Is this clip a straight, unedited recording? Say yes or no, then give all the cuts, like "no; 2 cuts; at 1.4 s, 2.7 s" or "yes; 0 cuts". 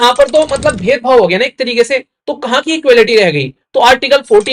yes; 0 cuts